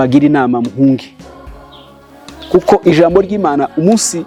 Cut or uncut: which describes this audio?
uncut